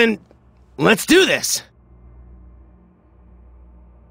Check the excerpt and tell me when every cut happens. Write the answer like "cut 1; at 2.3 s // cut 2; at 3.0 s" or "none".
cut 1; at 2.2 s